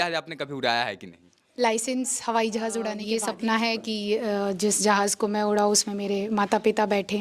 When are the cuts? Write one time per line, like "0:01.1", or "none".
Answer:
0:03.0

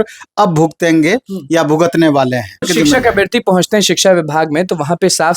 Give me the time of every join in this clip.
0:02.7

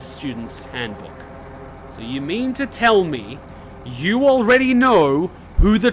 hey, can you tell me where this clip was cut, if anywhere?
0:01.7

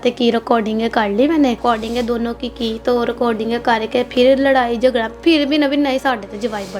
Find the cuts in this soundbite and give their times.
0:01.6
0:05.2

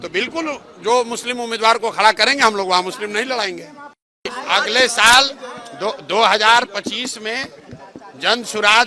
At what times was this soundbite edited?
0:04.3

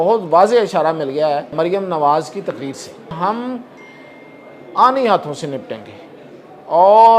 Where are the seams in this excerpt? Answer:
0:01.5
0:03.2

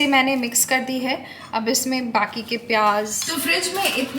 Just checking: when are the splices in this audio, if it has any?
0:03.2

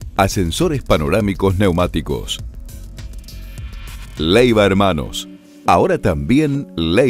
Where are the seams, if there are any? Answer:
0:02.3
0:04.2

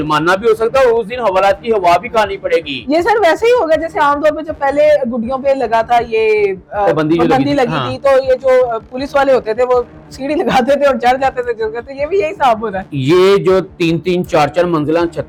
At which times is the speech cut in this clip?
none

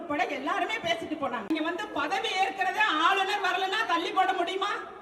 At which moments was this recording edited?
0:01.5

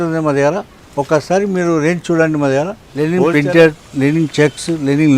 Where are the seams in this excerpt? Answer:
0:02.8

